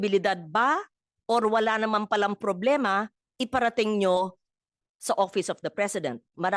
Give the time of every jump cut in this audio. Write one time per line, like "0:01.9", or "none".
none